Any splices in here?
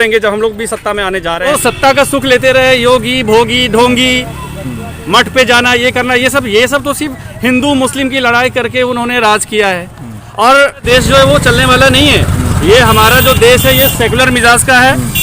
yes; 2 cuts; at 1.5 s, 10.8 s

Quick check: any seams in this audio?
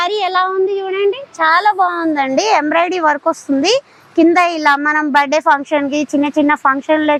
no; 0 cuts

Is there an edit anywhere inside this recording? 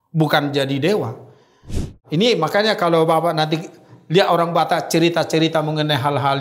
yes; 1 cut; at 1.8 s

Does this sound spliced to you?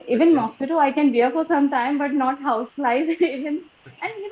no; 0 cuts

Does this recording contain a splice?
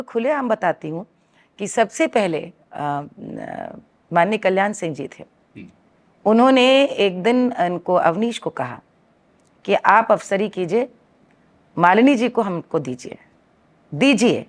no; 0 cuts

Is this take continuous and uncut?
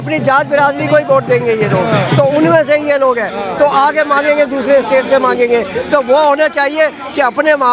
yes; 0 cuts

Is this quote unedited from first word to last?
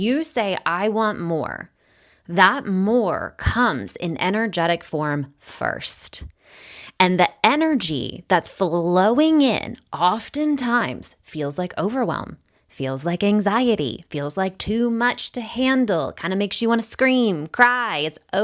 yes; 0 cuts

